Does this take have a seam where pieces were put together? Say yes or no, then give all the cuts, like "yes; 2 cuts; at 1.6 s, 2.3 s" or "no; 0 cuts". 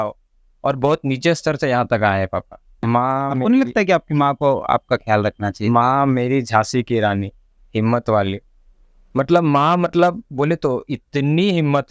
yes; 1 cut; at 2.7 s